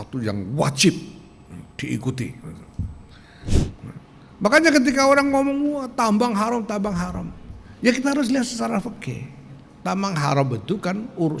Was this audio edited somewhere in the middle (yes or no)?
yes